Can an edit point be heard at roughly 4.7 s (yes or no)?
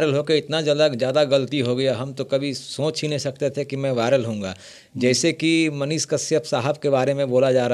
no